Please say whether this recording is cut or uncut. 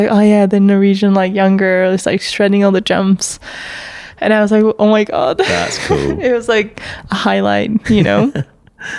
uncut